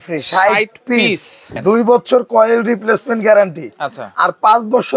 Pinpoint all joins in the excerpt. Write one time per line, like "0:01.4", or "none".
0:01.5